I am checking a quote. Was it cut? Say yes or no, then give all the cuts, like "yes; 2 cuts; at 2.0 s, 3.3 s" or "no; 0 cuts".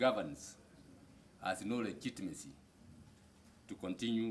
no; 0 cuts